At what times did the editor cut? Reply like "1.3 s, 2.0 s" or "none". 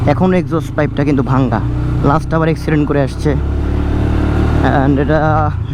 none